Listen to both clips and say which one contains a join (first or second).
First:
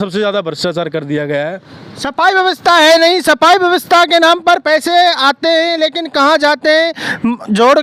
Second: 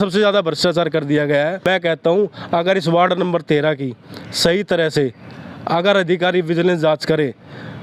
second